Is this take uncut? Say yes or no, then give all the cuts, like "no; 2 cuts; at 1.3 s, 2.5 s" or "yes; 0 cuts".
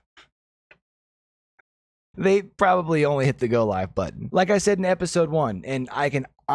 no; 1 cut; at 4.2 s